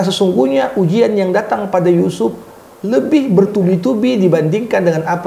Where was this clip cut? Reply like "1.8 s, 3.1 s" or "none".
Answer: none